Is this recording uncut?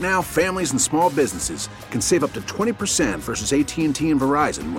yes; 0 cuts

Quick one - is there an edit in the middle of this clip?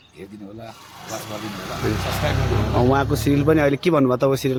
no; 0 cuts

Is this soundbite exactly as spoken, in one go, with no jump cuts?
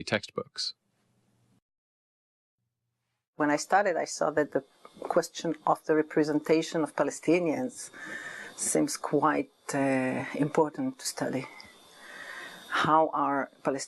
yes; 0 cuts

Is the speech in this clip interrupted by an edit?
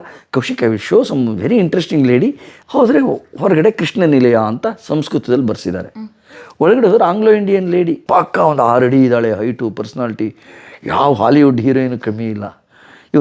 yes; 1 cut; at 2.5 s

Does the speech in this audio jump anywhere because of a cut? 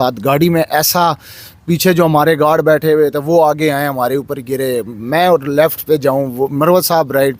no; 0 cuts

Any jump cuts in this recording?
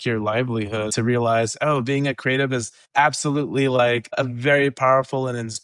yes; 3 cuts; at 0.9 s, 2.8 s, 4.2 s

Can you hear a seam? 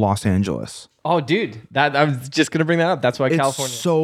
no; 0 cuts

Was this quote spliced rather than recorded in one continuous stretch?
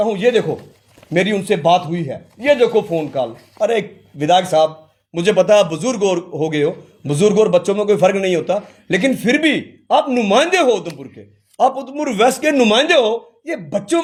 no; 0 cuts

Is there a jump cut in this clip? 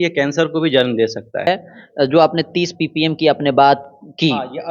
yes; 1 cut; at 1.5 s

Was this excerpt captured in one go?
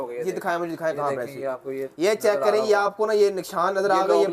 yes; 0 cuts

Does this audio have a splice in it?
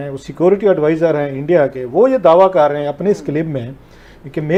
no; 0 cuts

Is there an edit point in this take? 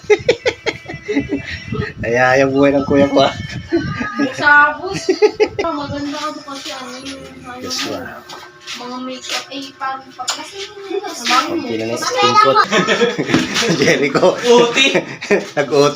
yes; 2 cuts; at 5.6 s, 12.6 s

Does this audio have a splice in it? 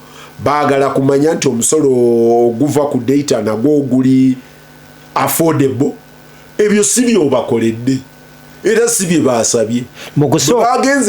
no; 0 cuts

